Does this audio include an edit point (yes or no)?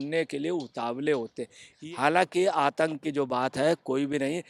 yes